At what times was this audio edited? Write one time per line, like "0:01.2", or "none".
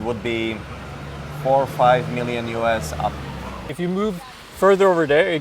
0:03.7